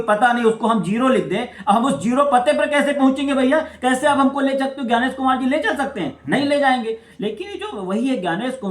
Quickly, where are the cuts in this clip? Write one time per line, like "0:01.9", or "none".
none

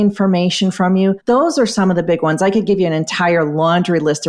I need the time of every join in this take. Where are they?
0:01.2

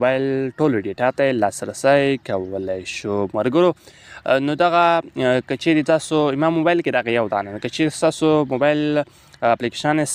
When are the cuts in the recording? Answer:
none

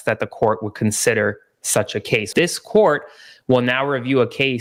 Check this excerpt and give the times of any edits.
none

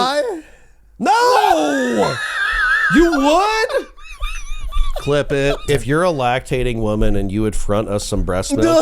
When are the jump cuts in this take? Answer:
0:05.6

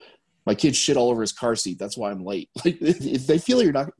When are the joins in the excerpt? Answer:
0:03.0

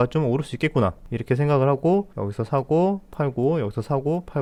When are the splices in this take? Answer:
none

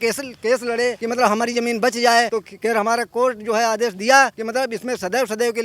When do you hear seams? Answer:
0:01.0
0:02.4
0:04.4

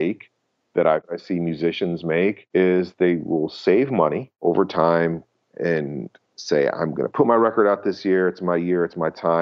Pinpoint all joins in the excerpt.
0:01.1
0:02.4
0:04.3

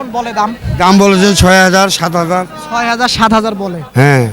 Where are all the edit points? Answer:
none

